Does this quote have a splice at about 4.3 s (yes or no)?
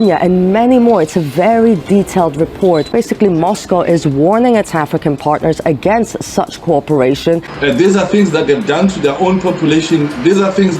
no